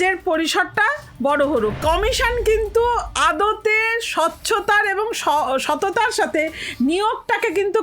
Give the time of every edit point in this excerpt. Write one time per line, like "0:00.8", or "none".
0:01.7